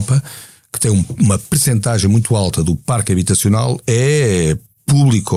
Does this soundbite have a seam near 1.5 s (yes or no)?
no